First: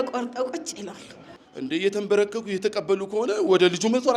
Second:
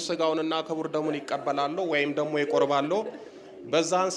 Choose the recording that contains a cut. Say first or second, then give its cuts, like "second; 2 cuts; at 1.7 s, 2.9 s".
first; 1 cut; at 1.3 s